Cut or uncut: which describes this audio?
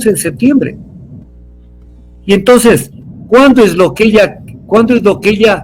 uncut